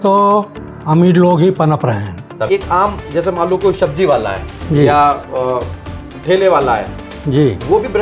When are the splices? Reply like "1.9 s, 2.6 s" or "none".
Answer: 2.5 s